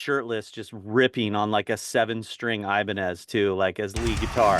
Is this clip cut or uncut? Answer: uncut